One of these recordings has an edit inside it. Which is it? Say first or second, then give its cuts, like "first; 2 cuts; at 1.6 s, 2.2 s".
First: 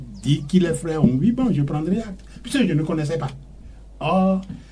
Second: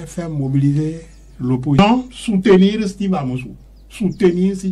second; 1 cut; at 1.8 s